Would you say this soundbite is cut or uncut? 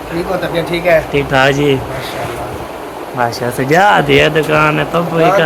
uncut